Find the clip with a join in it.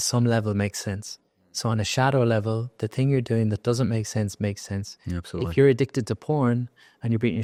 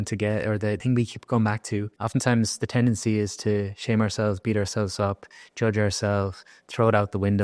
second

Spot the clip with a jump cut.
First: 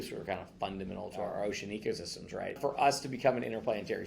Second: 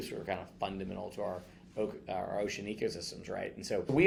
first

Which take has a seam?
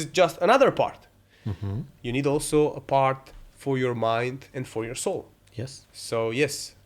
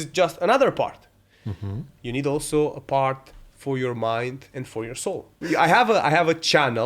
second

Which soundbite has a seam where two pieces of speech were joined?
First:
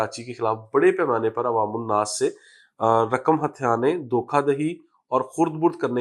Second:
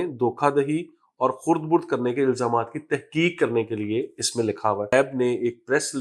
second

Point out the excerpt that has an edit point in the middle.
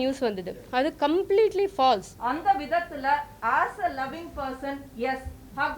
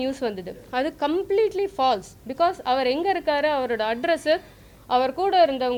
first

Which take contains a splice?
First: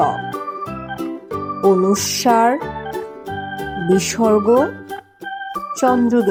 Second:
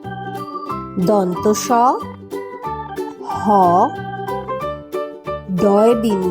second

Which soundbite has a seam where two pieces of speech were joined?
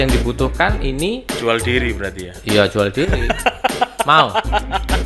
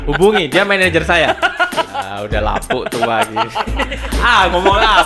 second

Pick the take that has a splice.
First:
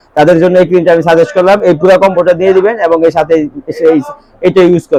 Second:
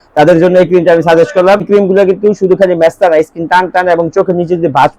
second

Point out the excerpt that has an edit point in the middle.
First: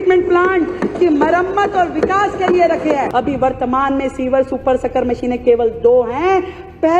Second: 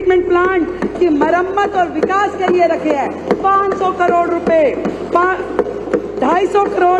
first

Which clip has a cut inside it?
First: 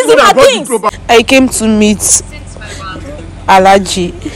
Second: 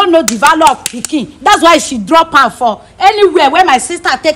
first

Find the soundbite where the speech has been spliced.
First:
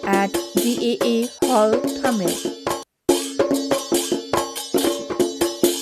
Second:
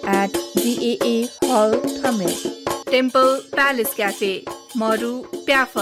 first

